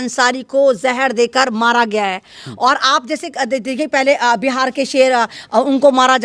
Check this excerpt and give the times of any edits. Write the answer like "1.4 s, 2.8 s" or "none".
none